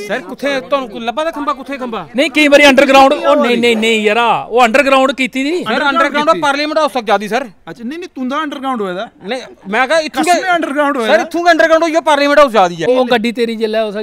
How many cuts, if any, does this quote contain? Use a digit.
1